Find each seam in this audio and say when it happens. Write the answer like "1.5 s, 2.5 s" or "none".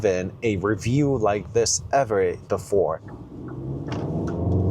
3.0 s